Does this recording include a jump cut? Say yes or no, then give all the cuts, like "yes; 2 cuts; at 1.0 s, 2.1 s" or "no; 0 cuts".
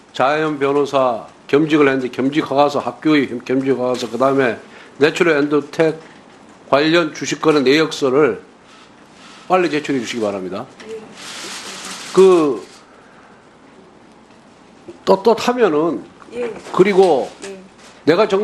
no; 0 cuts